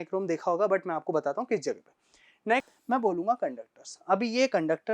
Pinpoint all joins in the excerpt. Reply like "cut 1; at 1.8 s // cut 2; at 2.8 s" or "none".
cut 1; at 2.6 s